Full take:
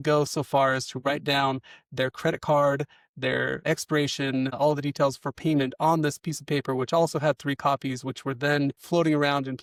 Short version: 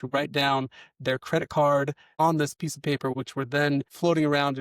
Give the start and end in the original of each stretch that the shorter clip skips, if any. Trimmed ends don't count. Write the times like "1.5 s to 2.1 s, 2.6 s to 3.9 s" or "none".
3.0 s to 5.7 s, 6.8 s to 8.0 s